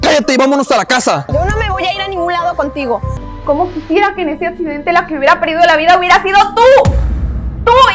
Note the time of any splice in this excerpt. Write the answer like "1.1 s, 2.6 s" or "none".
3.1 s